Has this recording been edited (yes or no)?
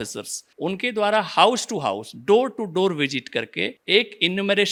no